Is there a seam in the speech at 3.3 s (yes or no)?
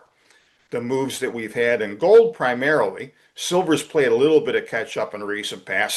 no